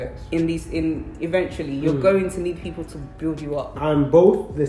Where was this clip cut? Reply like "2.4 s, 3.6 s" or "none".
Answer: 3.8 s